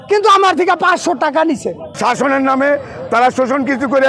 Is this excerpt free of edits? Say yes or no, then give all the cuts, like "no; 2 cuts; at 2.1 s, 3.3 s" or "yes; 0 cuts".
no; 1 cut; at 1.9 s